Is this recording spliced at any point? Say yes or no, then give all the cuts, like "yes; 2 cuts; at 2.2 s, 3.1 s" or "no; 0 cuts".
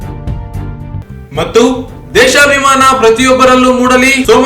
yes; 1 cut; at 1.0 s